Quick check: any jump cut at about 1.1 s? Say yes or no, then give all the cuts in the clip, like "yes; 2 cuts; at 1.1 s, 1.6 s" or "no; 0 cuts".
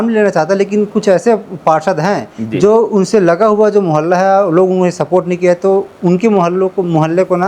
no; 0 cuts